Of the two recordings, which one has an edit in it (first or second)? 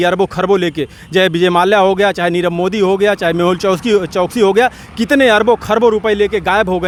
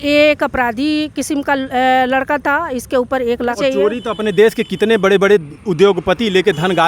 second